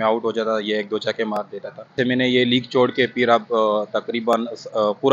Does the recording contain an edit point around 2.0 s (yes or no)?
yes